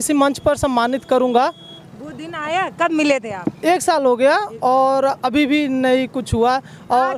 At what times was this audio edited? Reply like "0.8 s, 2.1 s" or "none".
none